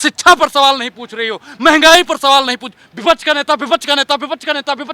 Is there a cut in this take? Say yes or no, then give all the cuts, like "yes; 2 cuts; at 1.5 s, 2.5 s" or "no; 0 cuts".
no; 0 cuts